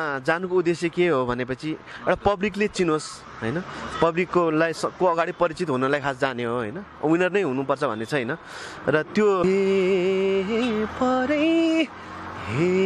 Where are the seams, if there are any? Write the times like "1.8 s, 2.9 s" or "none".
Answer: 9.4 s